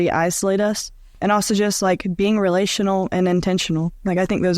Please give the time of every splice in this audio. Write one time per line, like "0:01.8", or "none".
0:01.1

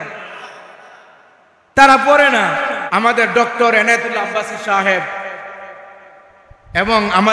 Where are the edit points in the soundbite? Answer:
0:02.8

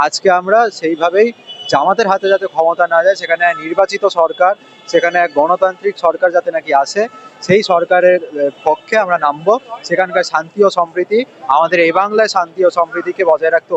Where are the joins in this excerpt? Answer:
none

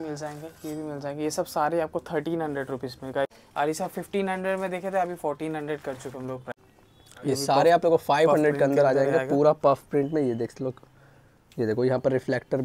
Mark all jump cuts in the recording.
0:03.4
0:06.5

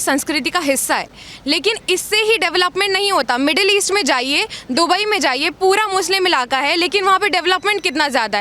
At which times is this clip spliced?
none

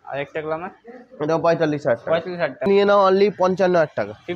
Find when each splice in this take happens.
0:02.7

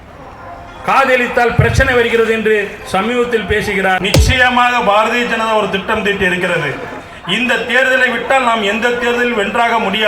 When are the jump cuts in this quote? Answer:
0:04.1

